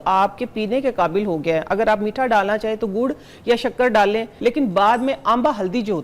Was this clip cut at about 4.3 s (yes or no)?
yes